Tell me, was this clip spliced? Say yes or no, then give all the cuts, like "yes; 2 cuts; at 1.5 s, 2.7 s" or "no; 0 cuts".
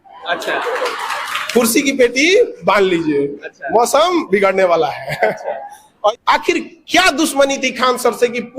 yes; 1 cut; at 6.1 s